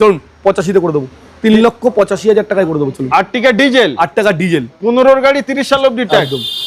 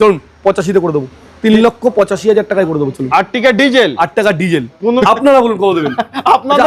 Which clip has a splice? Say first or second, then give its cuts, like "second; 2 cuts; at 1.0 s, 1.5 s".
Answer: second; 1 cut; at 5.0 s